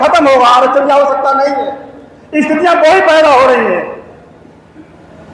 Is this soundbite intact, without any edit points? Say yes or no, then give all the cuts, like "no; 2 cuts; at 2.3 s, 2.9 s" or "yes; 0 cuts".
yes; 0 cuts